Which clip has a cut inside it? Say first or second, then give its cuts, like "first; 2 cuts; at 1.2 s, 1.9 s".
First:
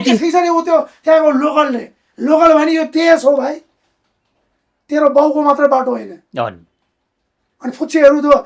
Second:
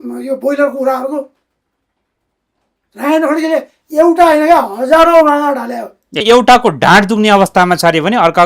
second; 1 cut; at 6.2 s